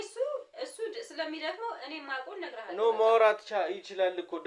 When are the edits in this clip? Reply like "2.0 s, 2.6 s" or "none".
none